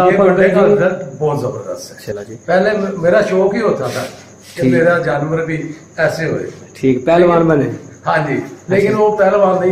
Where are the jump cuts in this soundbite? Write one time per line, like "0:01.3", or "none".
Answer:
0:02.1